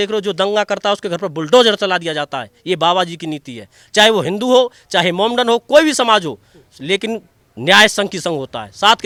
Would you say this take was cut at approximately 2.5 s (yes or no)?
no